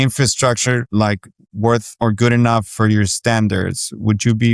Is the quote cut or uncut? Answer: cut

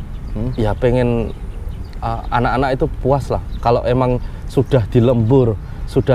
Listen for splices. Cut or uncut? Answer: uncut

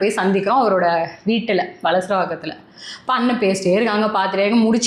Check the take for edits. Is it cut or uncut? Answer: uncut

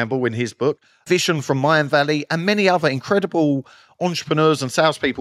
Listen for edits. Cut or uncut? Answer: cut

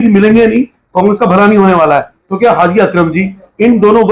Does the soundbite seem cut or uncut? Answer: uncut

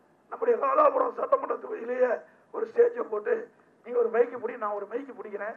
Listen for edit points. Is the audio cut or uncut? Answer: uncut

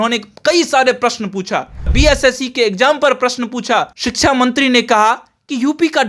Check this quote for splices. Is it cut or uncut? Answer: cut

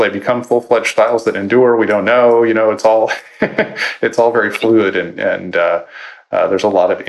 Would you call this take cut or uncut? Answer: uncut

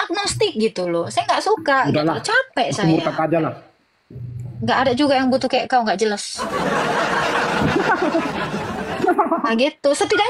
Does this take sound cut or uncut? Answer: uncut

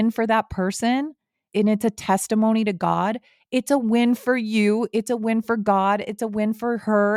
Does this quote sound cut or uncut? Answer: uncut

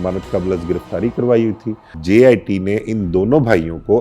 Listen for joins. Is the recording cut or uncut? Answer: cut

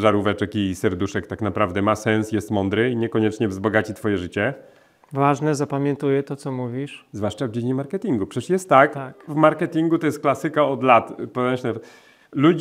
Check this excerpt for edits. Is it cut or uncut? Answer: uncut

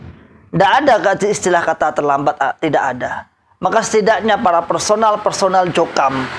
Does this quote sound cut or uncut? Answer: uncut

